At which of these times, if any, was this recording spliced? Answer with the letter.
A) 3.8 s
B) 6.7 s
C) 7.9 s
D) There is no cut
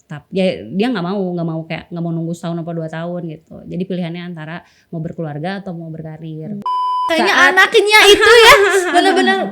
B